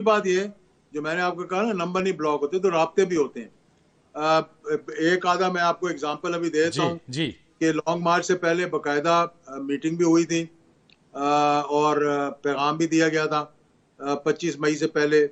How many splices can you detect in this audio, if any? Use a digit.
0